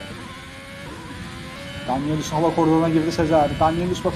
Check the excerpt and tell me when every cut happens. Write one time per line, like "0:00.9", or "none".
0:01.6